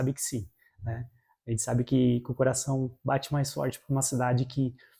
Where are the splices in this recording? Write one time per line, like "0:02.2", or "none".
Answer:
none